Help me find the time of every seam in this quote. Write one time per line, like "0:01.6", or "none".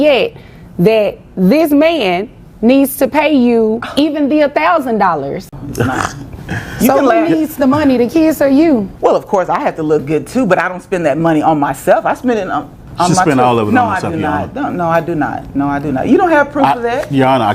0:05.6
0:08.9